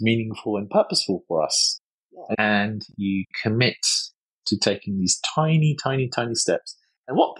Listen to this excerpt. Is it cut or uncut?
cut